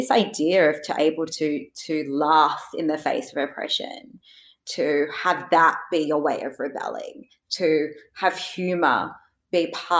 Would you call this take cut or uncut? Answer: uncut